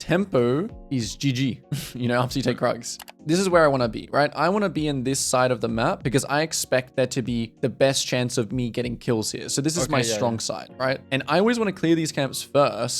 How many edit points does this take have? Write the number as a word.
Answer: three